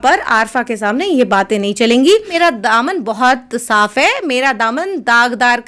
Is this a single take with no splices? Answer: yes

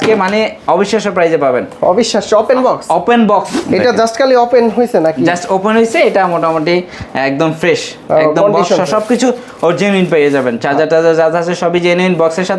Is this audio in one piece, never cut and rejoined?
no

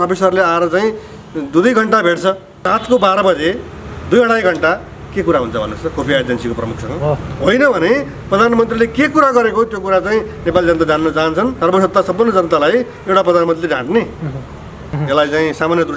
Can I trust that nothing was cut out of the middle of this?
no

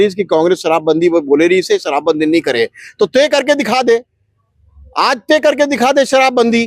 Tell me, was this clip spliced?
no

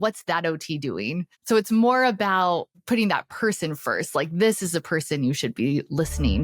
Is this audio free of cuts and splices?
no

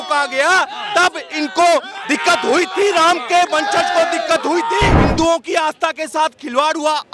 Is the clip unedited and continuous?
no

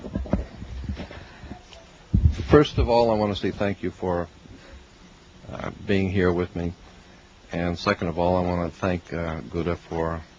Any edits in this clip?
no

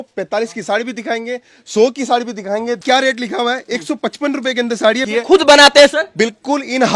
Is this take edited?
yes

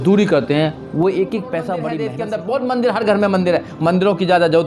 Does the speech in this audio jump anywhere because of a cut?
yes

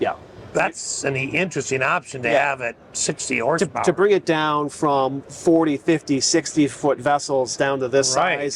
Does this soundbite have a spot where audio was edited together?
no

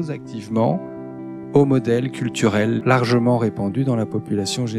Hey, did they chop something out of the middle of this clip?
yes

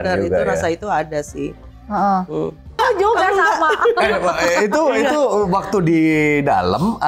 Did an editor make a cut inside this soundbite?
yes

